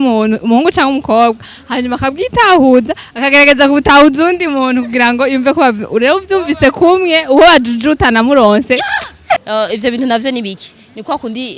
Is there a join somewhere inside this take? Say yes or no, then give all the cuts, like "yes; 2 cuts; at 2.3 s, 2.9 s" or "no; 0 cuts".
yes; 1 cut; at 9.4 s